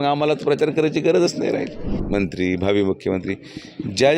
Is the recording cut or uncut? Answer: cut